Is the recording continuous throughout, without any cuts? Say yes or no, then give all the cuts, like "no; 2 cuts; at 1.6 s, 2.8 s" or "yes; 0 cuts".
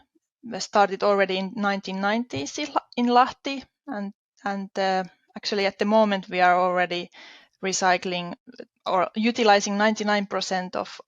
yes; 0 cuts